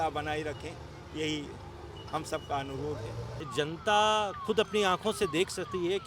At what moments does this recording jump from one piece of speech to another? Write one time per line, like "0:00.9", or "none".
0:03.4